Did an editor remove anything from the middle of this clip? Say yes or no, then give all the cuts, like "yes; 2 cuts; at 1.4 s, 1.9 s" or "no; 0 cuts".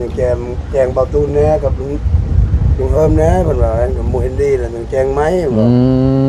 no; 0 cuts